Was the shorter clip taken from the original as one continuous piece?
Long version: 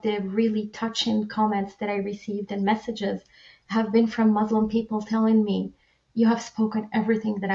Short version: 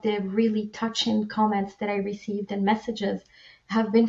yes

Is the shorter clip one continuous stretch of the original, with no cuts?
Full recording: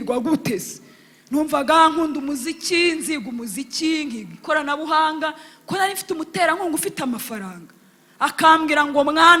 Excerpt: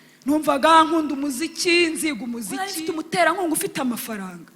no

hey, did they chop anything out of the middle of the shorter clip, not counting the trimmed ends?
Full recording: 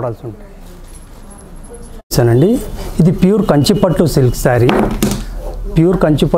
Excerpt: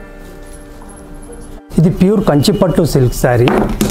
yes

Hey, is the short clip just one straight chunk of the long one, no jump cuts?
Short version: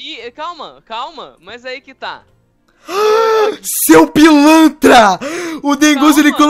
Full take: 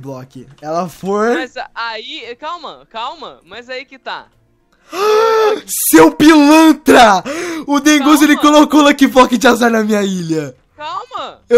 yes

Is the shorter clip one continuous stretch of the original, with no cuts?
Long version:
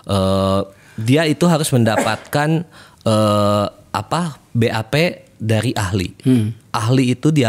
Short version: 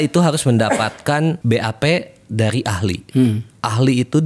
no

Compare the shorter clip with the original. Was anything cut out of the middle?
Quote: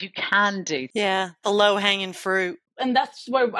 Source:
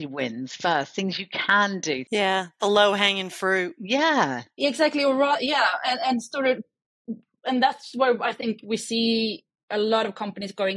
yes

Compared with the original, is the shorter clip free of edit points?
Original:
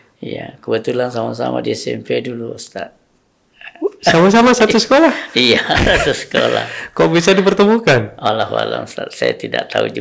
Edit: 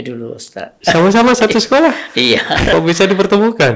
no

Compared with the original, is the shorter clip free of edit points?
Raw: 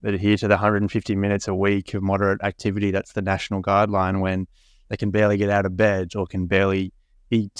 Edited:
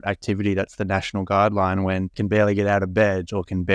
no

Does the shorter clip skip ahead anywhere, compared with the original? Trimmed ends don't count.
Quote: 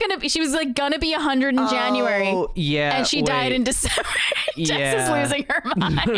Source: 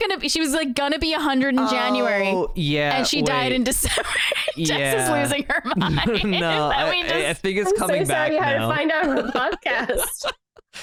no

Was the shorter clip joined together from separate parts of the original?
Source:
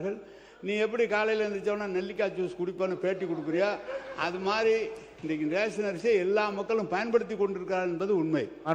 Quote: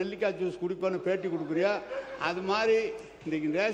no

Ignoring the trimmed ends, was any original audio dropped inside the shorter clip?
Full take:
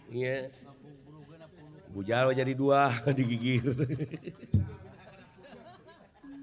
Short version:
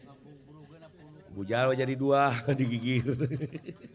no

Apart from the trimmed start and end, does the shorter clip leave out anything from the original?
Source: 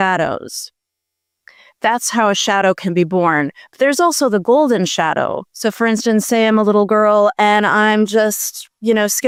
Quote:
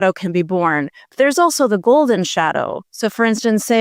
no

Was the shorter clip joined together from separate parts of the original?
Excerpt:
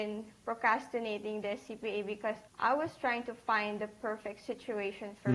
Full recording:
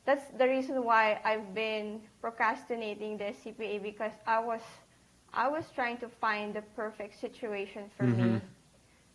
yes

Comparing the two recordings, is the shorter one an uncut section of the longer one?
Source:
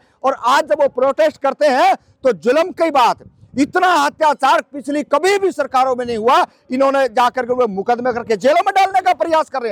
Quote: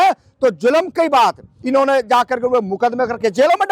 no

